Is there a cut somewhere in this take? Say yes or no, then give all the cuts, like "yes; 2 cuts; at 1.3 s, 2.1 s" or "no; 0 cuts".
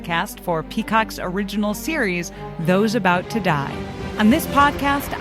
yes; 1 cut; at 4.0 s